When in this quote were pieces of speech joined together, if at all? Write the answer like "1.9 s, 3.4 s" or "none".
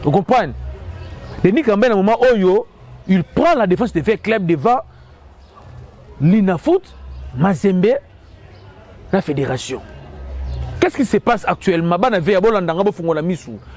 none